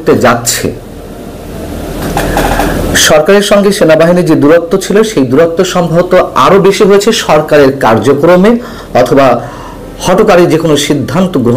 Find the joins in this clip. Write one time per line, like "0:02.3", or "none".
none